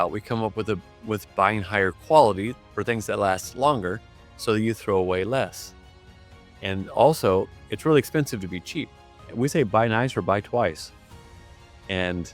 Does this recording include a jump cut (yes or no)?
yes